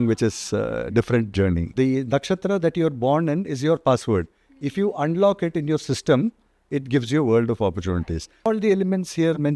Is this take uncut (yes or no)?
no